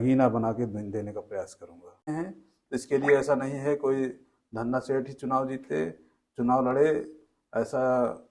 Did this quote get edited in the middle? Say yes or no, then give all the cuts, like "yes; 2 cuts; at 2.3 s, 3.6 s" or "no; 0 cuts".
yes; 1 cut; at 2.1 s